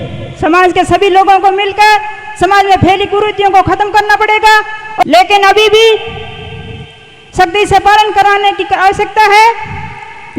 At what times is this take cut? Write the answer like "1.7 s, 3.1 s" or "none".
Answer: 5.0 s